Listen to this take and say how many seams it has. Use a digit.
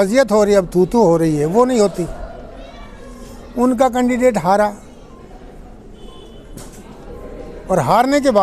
0